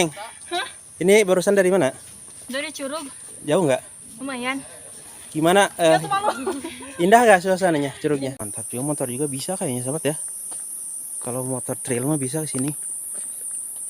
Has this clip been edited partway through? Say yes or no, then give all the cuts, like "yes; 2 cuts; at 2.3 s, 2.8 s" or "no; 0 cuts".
yes; 1 cut; at 8.3 s